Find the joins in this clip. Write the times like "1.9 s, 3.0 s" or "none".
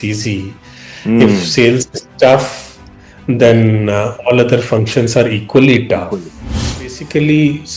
6.4 s